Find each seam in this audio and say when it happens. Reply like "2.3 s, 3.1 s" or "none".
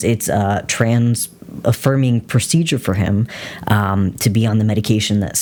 none